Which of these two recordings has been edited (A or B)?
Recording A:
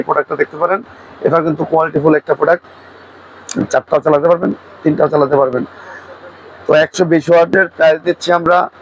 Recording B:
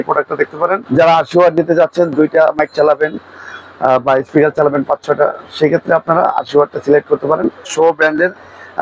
B